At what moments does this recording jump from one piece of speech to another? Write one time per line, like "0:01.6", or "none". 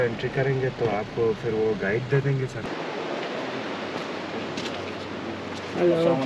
0:02.6